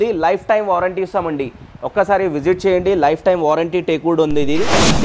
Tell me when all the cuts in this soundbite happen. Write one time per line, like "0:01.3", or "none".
none